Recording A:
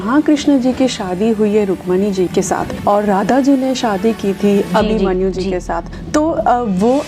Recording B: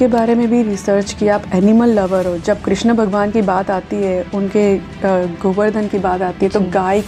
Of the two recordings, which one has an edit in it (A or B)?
A